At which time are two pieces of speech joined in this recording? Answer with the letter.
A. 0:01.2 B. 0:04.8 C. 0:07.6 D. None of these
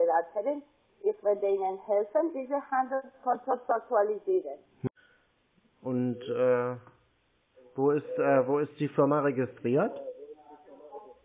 B